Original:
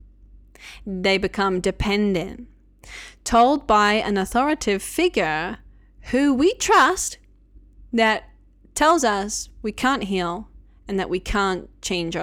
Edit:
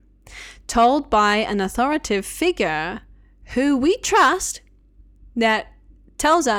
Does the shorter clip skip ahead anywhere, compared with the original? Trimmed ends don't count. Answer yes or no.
no